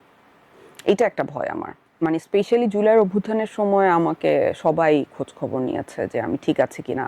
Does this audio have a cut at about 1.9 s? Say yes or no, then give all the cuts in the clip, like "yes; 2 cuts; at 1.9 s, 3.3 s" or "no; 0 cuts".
yes; 1 cut; at 1.9 s